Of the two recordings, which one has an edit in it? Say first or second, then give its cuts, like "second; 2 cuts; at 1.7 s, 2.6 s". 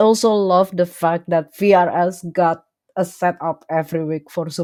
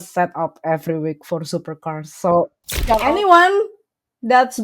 second; 1 cut; at 3.0 s